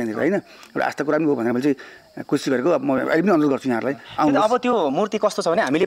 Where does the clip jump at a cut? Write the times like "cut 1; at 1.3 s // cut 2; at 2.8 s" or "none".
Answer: none